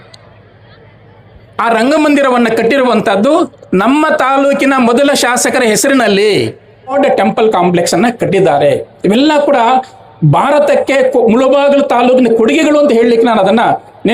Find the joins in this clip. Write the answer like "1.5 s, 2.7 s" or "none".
6.9 s